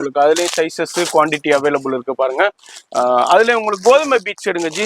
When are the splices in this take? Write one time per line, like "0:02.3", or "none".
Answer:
none